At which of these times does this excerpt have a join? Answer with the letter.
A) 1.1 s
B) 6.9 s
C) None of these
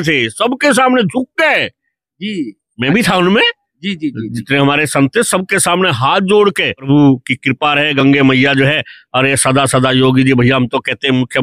B